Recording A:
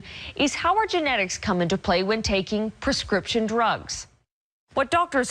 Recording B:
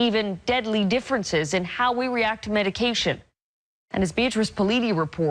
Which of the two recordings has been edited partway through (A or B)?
B